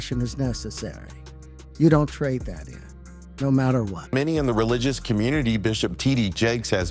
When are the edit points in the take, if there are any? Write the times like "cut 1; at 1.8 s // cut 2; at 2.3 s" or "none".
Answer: cut 1; at 4.0 s

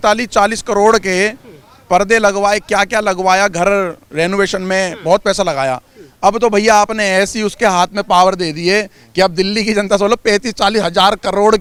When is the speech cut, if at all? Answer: none

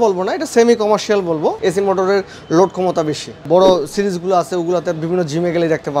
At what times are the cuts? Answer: cut 1; at 1.6 s // cut 2; at 3.4 s

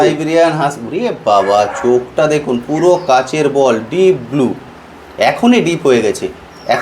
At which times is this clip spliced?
none

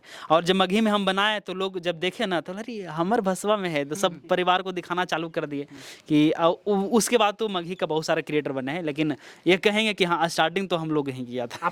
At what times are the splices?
none

